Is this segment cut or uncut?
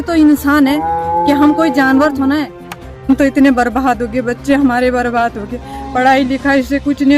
cut